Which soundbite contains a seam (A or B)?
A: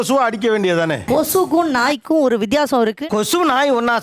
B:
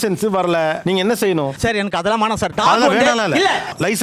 A